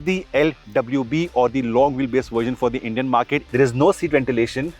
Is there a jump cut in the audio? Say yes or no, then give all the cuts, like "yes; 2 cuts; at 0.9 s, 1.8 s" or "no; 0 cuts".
yes; 1 cut; at 3.5 s